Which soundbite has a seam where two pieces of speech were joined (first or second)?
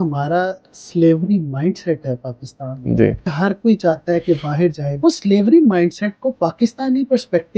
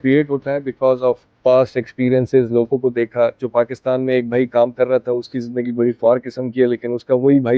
first